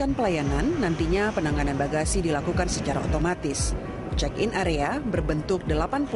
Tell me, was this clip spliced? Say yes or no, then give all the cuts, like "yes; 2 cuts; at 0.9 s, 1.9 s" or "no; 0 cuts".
no; 0 cuts